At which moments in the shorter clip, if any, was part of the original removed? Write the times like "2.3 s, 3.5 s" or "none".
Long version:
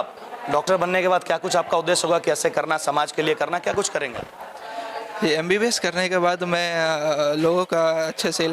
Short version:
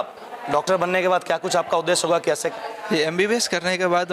2.5 s